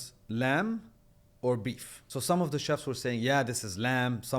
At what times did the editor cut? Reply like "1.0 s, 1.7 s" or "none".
1.9 s